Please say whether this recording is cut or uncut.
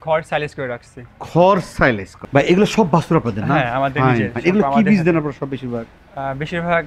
cut